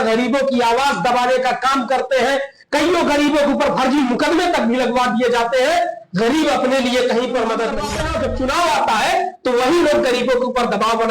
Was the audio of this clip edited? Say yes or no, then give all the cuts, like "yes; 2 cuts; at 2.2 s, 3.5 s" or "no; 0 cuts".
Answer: yes; 1 cut; at 7.8 s